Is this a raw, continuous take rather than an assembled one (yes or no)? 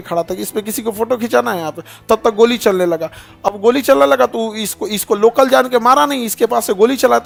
yes